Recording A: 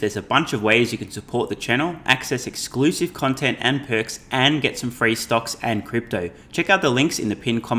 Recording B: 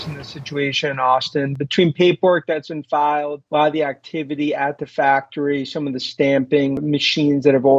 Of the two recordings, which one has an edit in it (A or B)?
B